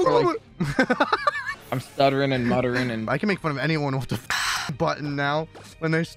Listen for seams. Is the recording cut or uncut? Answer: cut